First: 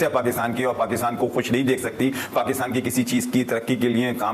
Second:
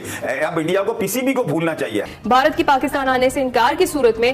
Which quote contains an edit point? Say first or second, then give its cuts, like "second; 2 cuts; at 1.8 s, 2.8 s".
second; 1 cut; at 2.1 s